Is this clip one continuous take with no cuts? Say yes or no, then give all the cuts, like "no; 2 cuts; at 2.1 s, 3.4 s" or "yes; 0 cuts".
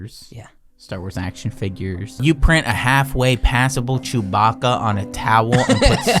no; 1 cut; at 2.2 s